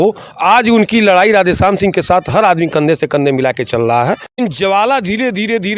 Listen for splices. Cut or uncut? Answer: cut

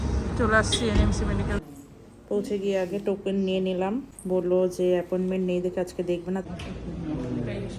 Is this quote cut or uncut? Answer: cut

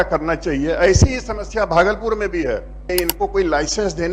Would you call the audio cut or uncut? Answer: cut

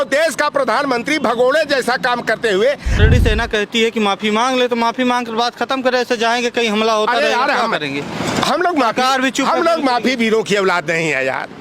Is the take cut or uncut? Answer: cut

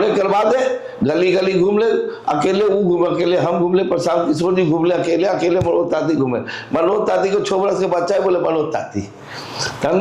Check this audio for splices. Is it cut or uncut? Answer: uncut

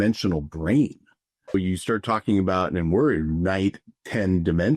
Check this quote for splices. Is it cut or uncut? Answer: cut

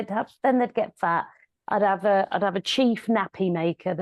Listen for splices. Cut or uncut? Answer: uncut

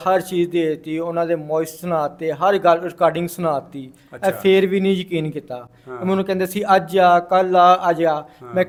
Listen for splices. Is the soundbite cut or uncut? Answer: uncut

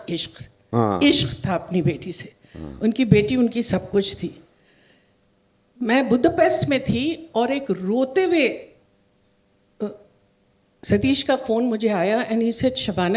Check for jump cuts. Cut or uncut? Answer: uncut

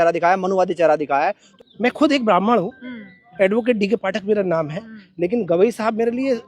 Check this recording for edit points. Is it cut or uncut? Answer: cut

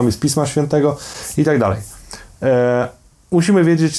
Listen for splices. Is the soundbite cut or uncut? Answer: uncut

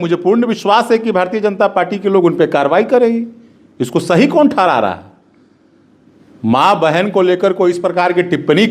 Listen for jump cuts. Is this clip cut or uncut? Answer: uncut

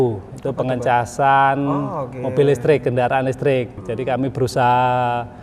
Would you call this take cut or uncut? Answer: cut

